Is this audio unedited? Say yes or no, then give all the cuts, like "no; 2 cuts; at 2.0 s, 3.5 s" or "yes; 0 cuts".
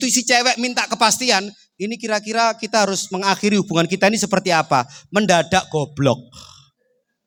yes; 0 cuts